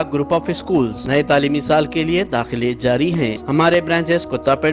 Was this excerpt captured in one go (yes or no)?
no